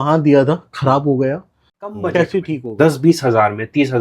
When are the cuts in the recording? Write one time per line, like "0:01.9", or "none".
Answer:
0:02.6